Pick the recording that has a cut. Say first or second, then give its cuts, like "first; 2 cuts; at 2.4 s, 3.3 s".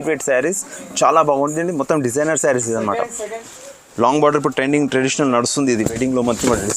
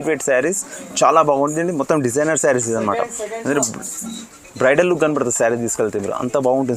first; 1 cut; at 3.4 s